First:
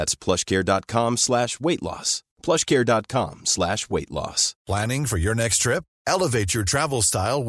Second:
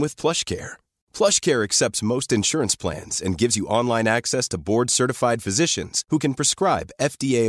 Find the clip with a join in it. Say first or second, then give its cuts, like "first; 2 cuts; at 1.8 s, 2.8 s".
first; 1 cut; at 4.5 s